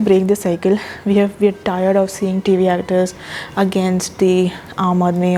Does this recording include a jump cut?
no; 0 cuts

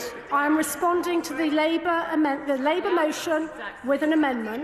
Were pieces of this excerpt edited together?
no; 0 cuts

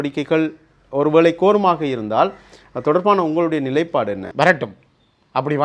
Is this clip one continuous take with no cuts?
no; 1 cut; at 4.3 s

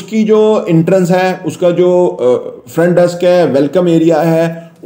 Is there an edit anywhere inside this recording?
no; 0 cuts

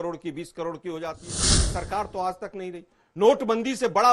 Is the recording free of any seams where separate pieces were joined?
no; 1 cut; at 1.6 s

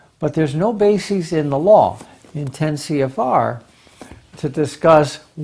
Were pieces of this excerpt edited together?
no; 0 cuts

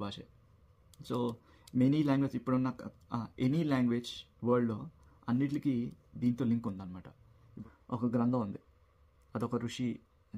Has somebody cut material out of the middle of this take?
yes; 1 cut; at 7.5 s

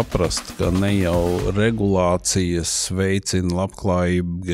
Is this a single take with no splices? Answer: yes; 0 cuts

